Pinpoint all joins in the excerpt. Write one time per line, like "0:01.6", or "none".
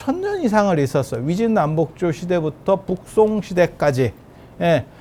none